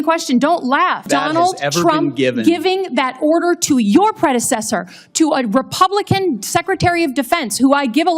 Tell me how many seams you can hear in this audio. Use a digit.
1